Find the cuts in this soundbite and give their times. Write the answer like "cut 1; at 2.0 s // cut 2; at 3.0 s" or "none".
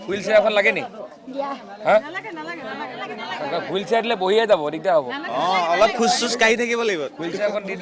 none